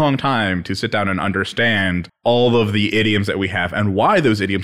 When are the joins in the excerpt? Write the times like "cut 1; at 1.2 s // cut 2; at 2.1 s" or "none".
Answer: cut 1; at 2.1 s